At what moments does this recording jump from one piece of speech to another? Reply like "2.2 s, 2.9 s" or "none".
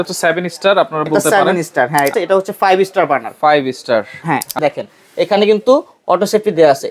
2.1 s, 4.6 s